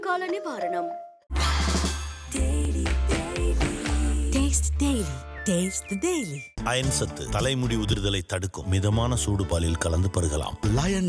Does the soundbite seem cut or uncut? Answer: uncut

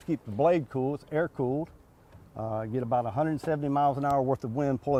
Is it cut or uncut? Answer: uncut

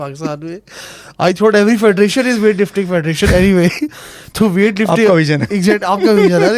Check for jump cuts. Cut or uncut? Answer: uncut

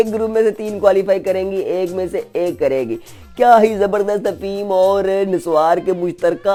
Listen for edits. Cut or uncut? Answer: uncut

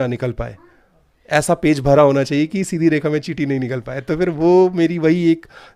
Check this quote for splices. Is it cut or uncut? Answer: uncut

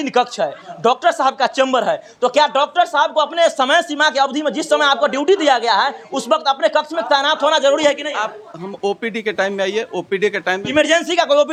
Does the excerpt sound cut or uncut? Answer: uncut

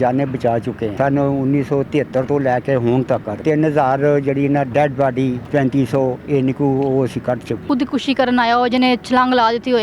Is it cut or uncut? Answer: cut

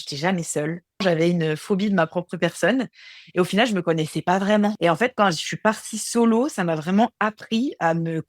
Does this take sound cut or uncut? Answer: cut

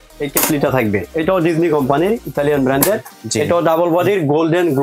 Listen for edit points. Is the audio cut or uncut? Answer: cut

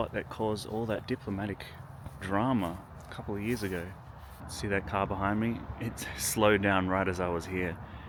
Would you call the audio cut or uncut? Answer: uncut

